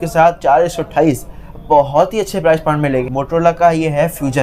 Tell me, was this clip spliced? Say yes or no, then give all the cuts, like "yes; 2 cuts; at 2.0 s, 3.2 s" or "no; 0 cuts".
yes; 1 cut; at 3.1 s